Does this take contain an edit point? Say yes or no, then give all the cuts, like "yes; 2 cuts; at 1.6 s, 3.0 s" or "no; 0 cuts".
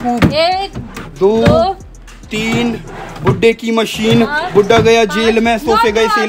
no; 0 cuts